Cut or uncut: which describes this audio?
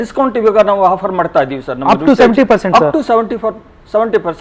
uncut